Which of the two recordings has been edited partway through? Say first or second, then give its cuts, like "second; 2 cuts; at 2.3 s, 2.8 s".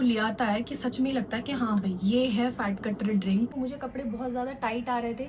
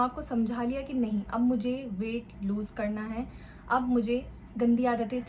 first; 1 cut; at 3.5 s